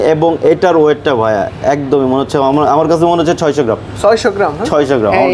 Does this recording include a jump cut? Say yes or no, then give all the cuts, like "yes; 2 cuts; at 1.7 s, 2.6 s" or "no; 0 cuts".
no; 0 cuts